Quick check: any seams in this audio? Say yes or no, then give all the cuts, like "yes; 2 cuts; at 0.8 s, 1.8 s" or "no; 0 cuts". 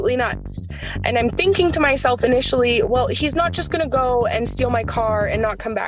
no; 0 cuts